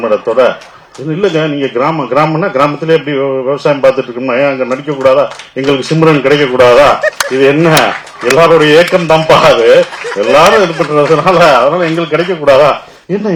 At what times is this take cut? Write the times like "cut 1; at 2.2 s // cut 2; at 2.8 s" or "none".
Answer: none